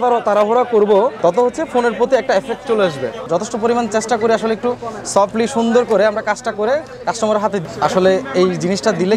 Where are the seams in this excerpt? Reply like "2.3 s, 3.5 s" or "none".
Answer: 3.2 s, 7.6 s